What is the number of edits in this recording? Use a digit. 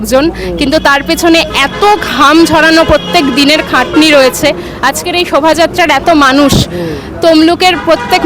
0